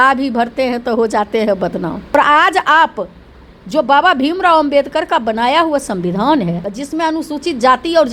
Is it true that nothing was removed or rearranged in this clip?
no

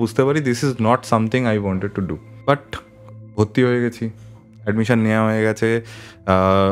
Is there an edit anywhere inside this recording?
yes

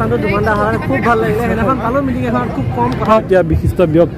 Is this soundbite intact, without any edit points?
no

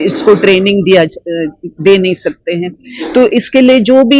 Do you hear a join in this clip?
no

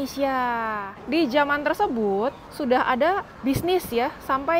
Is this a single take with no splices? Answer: no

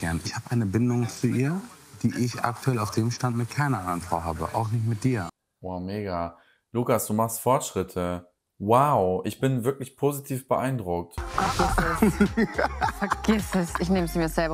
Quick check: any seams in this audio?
yes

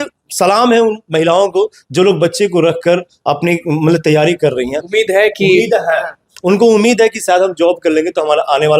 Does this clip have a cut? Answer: no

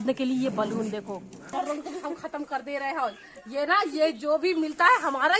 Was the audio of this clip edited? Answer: no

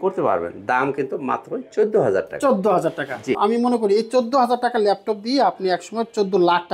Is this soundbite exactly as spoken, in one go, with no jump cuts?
no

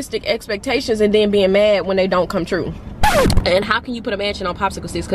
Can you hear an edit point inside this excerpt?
yes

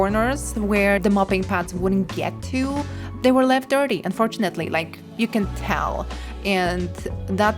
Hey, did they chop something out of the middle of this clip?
no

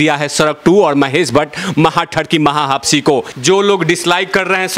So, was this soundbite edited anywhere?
yes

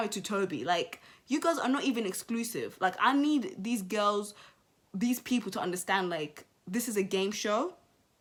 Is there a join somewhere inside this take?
no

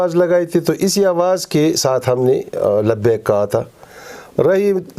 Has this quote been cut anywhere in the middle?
no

